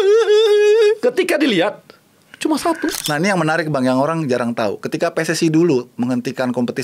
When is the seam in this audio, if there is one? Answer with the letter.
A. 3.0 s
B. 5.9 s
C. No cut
A